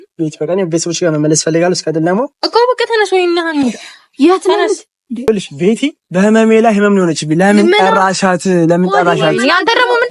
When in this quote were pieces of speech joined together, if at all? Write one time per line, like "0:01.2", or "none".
0:05.3

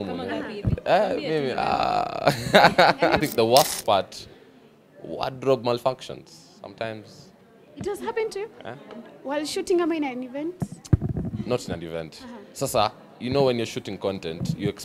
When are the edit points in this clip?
0:03.2

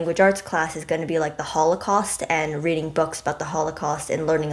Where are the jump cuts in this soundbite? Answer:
none

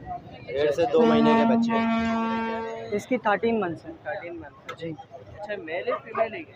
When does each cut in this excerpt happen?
0:02.5

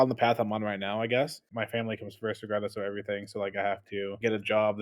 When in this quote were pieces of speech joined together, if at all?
0:01.5

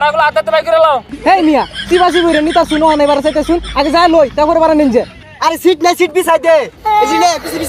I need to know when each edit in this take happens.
0:01.1
0:05.2

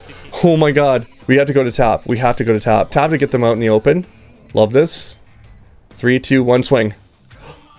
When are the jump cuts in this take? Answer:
0:01.1
0:02.9

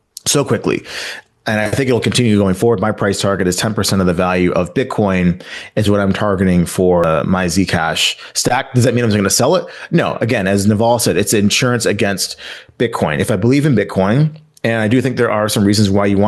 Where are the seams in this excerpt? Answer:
0:07.0

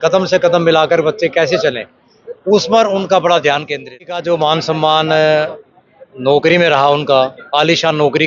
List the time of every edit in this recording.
0:04.2

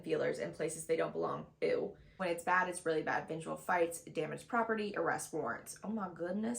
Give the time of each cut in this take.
0:02.2

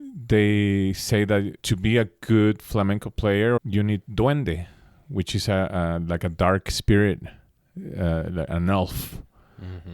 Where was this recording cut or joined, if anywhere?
0:01.6
0:03.6

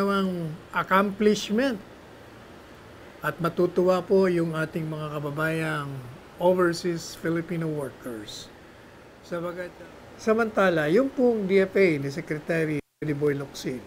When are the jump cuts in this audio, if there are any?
0:09.7

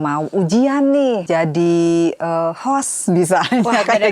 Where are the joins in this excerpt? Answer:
0:01.2

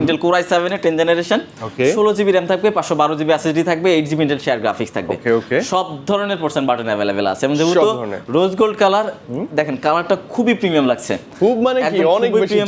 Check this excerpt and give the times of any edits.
none

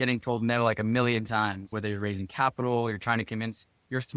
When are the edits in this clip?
0:01.7

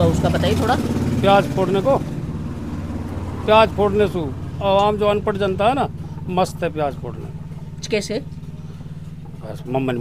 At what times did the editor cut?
none

